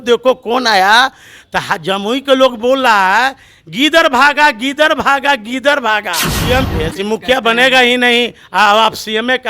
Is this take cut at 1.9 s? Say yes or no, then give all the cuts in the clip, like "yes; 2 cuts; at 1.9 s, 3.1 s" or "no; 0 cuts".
no; 1 cut; at 6.4 s